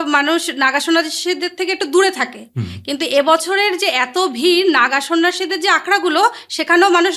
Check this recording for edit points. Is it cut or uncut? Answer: uncut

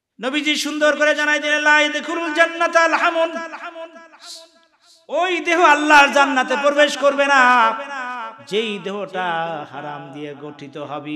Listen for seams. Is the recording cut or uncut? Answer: uncut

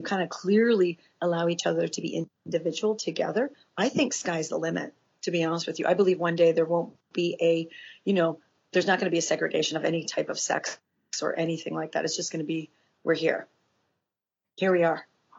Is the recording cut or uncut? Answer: uncut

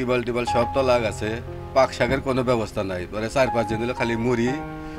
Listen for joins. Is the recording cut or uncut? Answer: uncut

